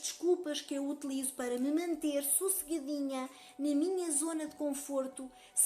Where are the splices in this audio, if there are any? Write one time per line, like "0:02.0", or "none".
none